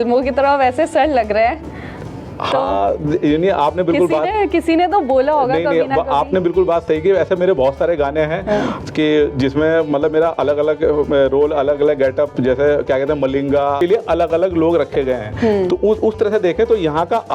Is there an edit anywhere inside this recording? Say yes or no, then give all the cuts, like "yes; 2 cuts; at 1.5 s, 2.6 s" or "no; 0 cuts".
yes; 1 cut; at 13.8 s